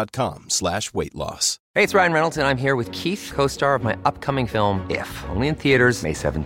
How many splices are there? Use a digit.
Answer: 1